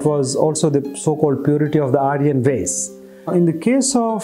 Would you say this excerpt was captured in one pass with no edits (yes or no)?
yes